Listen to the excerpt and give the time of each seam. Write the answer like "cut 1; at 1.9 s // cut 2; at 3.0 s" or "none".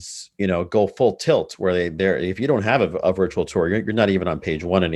none